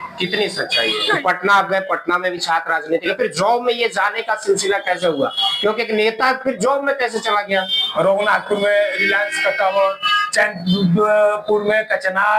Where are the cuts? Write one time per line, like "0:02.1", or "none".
0:01.2
0:07.8